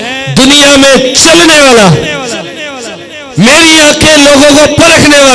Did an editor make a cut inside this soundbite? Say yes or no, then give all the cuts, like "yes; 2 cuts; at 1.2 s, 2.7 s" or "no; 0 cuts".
no; 0 cuts